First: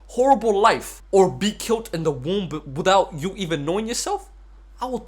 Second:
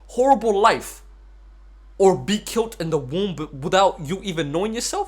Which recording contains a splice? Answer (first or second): first